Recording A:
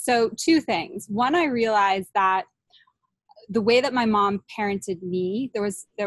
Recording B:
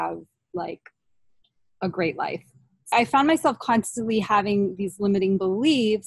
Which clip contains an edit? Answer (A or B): B